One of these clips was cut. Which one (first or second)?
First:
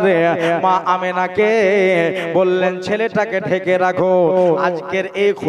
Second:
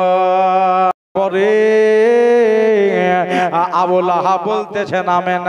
second